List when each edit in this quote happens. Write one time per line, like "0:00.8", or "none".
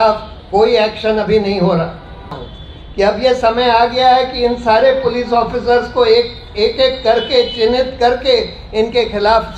0:02.3